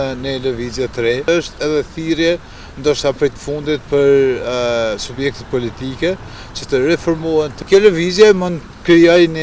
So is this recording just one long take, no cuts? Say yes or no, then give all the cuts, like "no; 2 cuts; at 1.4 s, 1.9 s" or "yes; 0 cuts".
no; 2 cuts; at 1.3 s, 7.5 s